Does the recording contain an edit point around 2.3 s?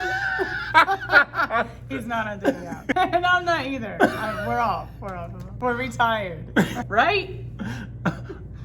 no; 2 cuts; at 5.6 s, 6.7 s

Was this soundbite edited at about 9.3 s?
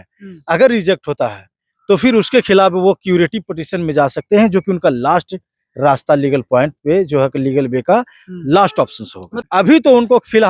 yes; 1 cut; at 9.3 s

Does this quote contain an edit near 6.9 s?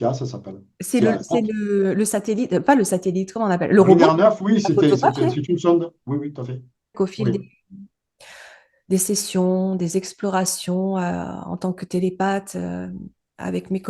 yes; 1 cut; at 6.9 s

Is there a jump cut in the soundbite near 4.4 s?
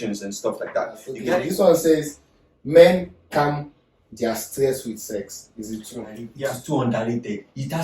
no; 2 cuts; at 1.2 s, 6.3 s

